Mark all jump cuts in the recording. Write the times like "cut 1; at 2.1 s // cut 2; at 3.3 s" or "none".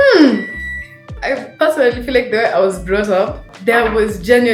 cut 1; at 1.2 s // cut 2; at 3.5 s

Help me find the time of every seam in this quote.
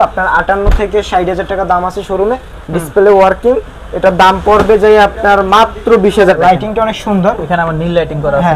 cut 1; at 6.4 s

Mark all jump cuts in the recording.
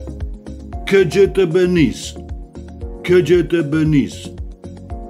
cut 1; at 0.9 s // cut 2; at 4.1 s

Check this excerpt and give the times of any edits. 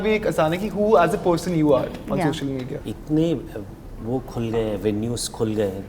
cut 1; at 2.7 s

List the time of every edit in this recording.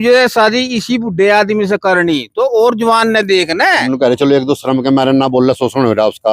cut 1; at 3.9 s

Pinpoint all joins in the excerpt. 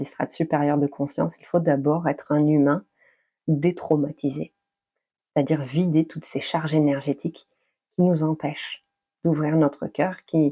none

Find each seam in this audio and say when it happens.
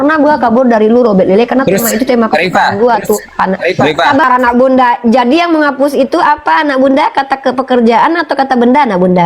cut 1; at 4.2 s

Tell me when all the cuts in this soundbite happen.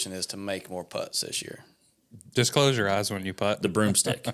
none

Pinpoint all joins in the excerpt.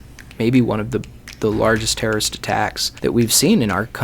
cut 1; at 2.8 s

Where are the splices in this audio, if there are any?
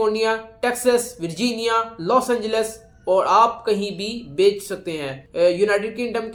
none

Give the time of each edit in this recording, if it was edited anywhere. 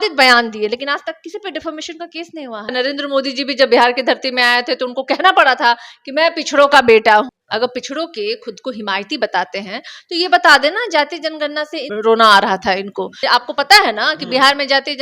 cut 1; at 2.7 s // cut 2; at 7.4 s // cut 3; at 11.9 s // cut 4; at 13.2 s

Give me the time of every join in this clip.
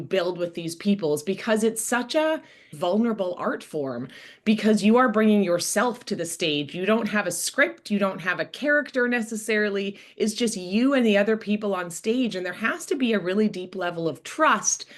cut 1; at 2.7 s

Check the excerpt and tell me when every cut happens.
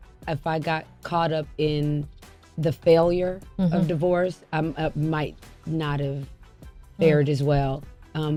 none

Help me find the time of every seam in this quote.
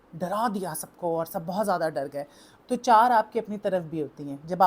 cut 1; at 2.5 s

